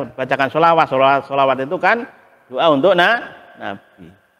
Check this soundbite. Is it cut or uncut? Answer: uncut